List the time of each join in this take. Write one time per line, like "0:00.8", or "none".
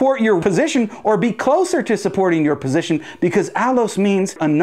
none